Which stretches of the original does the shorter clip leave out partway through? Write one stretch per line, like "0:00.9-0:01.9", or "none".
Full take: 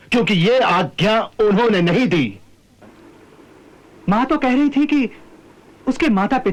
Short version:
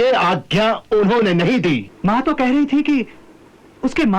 0:02.4-0:03.9

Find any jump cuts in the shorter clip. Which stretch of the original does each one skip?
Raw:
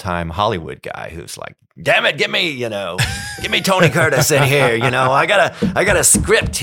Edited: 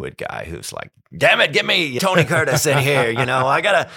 0:02.6-0:03.6

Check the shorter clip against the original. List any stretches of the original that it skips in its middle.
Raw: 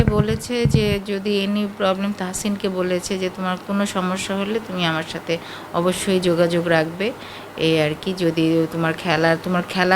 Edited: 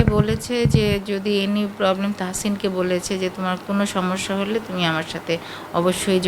none

